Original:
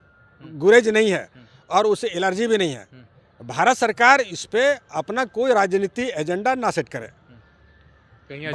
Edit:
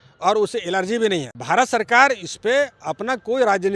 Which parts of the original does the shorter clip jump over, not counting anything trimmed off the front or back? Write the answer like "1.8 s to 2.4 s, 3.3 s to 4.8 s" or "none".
2.8 s to 3.4 s